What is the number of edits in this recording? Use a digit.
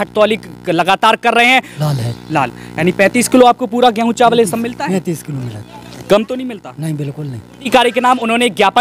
2